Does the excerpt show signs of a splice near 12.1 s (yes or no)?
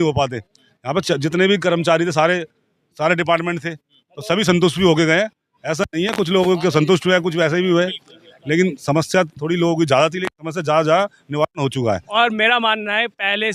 yes